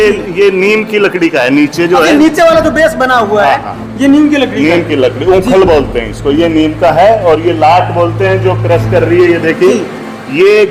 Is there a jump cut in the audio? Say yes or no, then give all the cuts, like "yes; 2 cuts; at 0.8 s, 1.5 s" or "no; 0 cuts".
no; 0 cuts